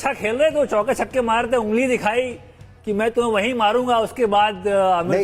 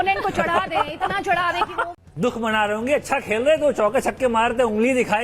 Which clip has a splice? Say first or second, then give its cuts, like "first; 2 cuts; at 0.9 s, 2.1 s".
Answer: second; 1 cut; at 1.8 s